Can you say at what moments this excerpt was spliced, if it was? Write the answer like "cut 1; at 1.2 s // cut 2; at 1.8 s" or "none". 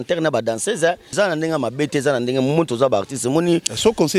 cut 1; at 1.1 s